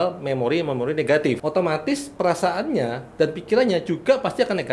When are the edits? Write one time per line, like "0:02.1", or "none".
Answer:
0:01.4